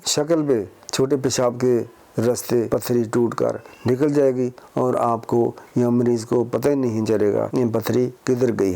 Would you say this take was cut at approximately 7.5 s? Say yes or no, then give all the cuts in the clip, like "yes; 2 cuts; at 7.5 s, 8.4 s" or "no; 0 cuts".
yes; 2 cuts; at 2.7 s, 7.5 s